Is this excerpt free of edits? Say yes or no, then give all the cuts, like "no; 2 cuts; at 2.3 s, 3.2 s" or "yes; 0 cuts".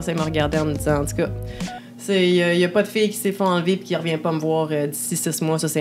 yes; 0 cuts